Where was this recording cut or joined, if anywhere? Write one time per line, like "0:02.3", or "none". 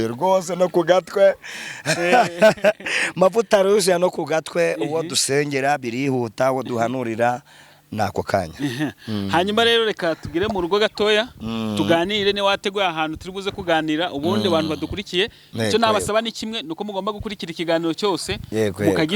none